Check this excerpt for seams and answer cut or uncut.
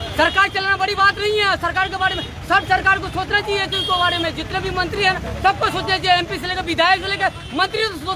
uncut